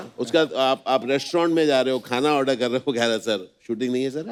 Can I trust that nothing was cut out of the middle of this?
yes; 0 cuts

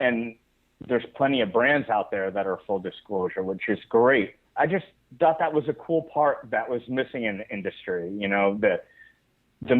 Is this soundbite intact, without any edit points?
no; 1 cut; at 4.4 s

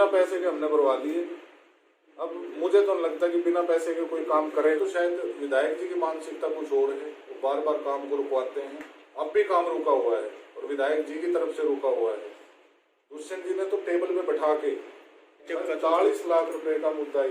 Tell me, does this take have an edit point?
yes; 2 cuts; at 4.8 s, 15.5 s

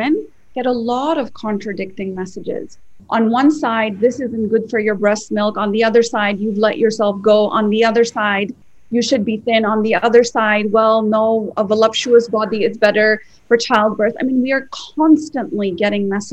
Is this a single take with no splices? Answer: yes; 0 cuts

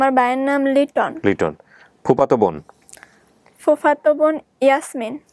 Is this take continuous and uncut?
yes; 0 cuts

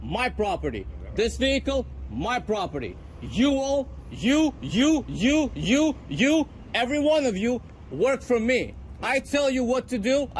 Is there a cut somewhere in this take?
no; 0 cuts

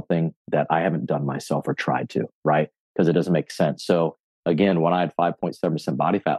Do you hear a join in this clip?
no; 0 cuts

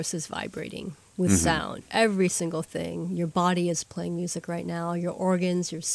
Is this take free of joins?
no; 1 cut; at 1.8 s

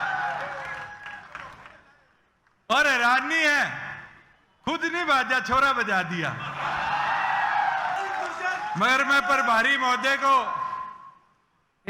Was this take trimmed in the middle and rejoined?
yes; 1 cut; at 8.0 s

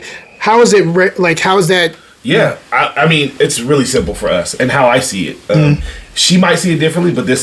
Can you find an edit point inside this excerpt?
yes; 1 cut; at 2.1 s

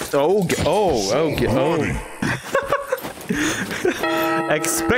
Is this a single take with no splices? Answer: no; 1 cut; at 2.2 s

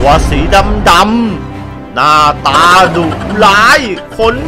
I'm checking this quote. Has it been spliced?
no; 0 cuts

